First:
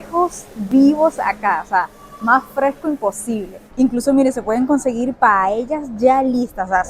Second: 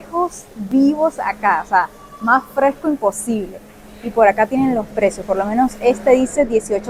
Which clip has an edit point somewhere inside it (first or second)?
first